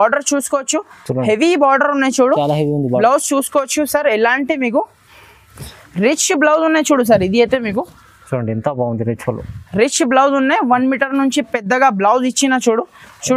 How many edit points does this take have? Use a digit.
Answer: 0